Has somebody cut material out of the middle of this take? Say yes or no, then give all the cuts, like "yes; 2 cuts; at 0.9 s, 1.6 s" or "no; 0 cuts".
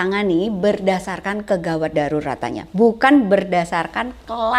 no; 0 cuts